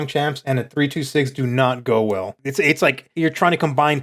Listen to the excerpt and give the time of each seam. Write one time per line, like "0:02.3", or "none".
0:02.4